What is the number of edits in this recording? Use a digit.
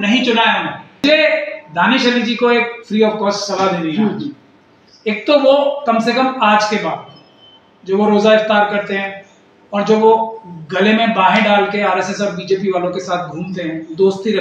1